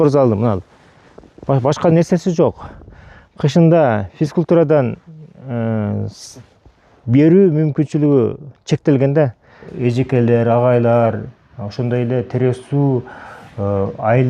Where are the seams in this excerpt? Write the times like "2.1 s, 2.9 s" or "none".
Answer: 9.7 s